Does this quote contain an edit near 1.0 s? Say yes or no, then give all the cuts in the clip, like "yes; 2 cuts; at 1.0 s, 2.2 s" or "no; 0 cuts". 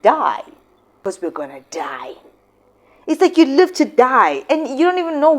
yes; 1 cut; at 1.0 s